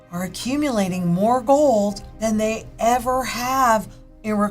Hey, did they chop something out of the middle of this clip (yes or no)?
yes